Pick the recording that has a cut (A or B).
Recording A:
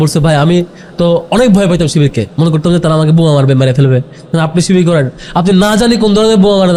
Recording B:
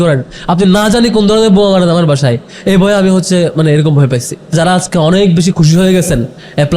B